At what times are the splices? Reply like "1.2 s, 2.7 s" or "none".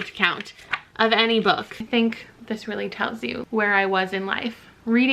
1.7 s, 3.4 s